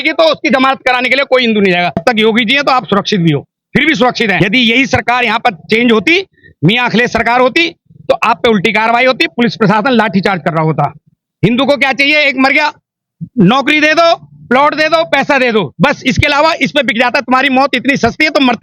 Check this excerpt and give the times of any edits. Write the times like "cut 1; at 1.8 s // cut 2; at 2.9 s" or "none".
cut 1; at 2.0 s // cut 2; at 4.4 s // cut 3; at 11.2 s